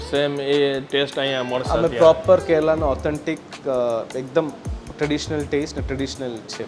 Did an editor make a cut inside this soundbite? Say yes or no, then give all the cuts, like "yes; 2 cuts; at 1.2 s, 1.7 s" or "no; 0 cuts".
no; 0 cuts